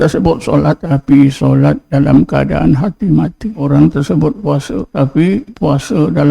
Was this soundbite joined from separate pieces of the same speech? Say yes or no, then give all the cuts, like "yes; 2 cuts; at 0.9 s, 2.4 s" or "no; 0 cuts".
yes; 5 cuts; at 0.8 s, 1.8 s, 3.6 s, 4.9 s, 5.5 s